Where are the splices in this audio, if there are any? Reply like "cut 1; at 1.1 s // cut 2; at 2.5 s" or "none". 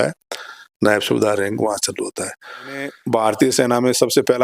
cut 1; at 3.0 s